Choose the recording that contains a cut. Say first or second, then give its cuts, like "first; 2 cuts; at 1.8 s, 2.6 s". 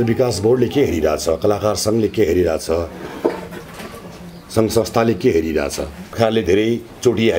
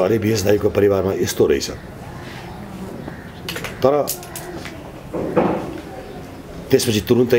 first; 1 cut; at 6.0 s